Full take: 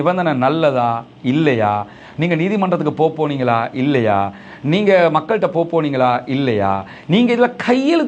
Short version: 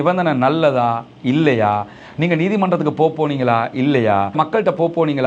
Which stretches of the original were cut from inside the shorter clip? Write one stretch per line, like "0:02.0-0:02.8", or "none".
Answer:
0:04.3-0:05.1